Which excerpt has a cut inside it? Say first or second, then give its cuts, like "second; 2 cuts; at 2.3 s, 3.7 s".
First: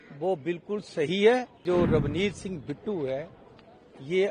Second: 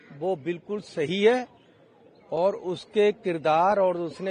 first; 1 cut; at 1.6 s